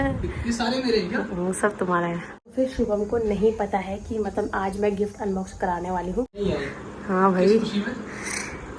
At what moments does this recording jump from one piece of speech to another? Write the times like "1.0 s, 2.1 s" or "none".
2.4 s, 6.4 s